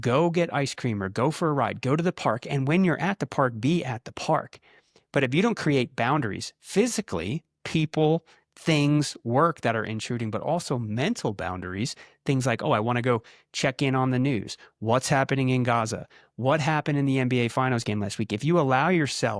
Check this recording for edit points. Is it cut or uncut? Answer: uncut